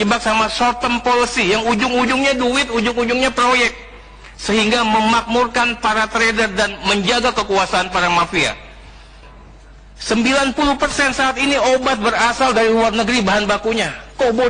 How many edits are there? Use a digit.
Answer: 1